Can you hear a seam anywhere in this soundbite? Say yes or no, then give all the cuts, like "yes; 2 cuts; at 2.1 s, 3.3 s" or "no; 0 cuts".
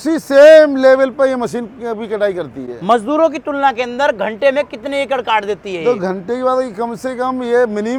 no; 0 cuts